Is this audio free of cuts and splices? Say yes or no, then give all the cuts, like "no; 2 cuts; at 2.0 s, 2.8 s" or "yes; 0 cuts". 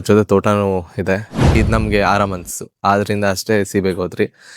no; 1 cut; at 1.5 s